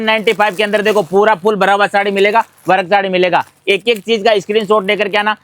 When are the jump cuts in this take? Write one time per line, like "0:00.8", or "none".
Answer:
none

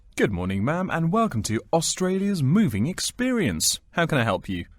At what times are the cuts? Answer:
none

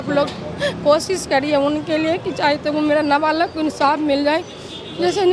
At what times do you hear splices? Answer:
none

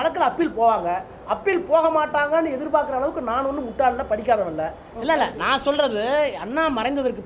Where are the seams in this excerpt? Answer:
0:04.9

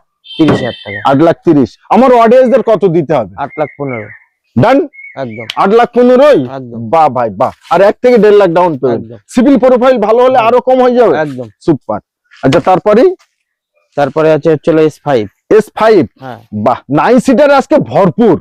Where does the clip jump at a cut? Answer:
none

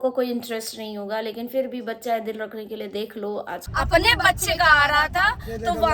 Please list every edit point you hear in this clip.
0:03.7

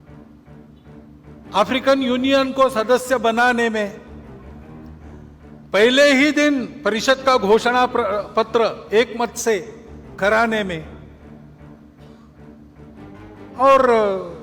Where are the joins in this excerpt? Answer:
0:00.9
0:04.0
0:05.7
0:10.9
0:13.5

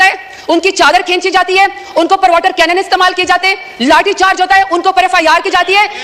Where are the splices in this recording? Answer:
none

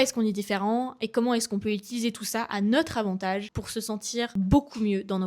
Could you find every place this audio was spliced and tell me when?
0:04.0

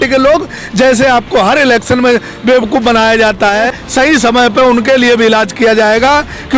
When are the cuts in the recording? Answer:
0:03.8

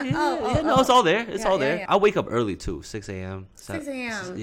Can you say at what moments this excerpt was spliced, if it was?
0:01.9

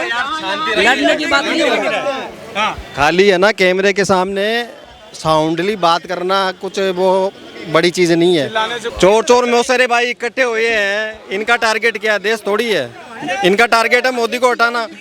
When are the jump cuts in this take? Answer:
0:08.8

